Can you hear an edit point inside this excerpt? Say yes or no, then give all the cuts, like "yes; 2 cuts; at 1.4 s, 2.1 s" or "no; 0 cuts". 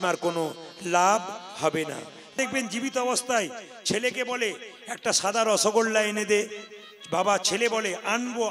yes; 1 cut; at 2.4 s